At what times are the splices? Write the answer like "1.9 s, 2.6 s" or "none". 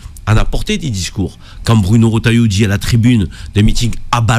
none